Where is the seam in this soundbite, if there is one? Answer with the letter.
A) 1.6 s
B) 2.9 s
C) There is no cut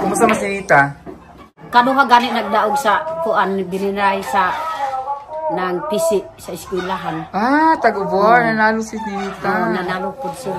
A